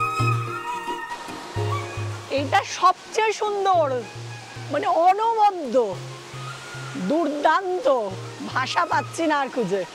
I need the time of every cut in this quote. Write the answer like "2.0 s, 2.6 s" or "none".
2.1 s